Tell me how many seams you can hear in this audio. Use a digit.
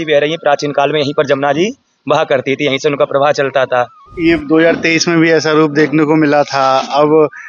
1